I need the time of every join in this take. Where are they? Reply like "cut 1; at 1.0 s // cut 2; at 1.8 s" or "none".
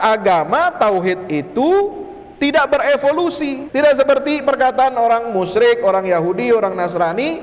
cut 1; at 3.6 s